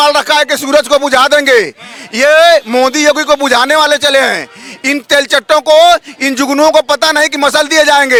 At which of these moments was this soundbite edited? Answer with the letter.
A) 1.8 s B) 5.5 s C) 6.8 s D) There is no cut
D